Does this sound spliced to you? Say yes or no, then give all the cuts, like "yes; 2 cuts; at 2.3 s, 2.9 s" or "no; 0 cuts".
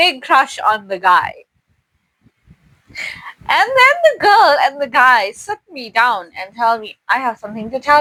no; 0 cuts